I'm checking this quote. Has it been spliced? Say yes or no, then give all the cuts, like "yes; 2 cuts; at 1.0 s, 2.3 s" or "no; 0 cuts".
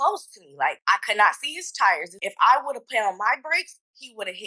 yes; 2 cuts; at 0.8 s, 2.1 s